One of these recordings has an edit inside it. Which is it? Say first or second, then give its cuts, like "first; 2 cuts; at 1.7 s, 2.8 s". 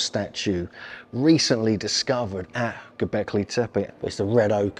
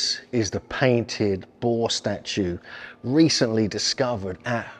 first; 1 cut; at 3.9 s